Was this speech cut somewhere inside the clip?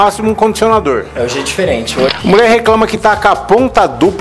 yes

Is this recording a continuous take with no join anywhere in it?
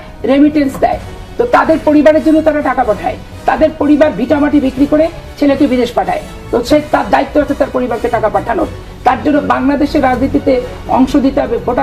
yes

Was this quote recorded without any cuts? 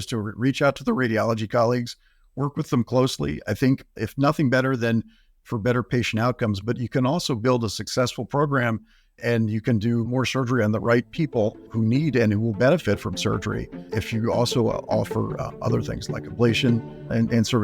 yes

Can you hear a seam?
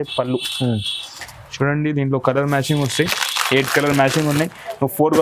no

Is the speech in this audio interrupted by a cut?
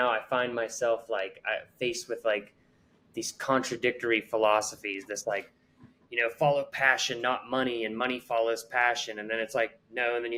no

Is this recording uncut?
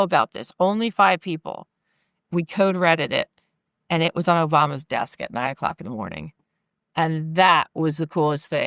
no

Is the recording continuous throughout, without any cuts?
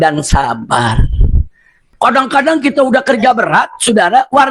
no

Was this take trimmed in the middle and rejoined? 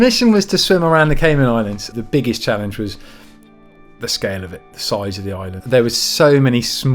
yes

